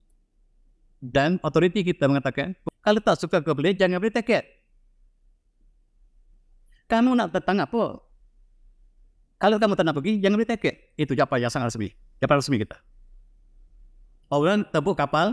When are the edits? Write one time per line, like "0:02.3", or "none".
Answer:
0:02.5